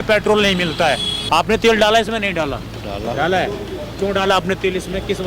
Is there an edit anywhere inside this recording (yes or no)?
yes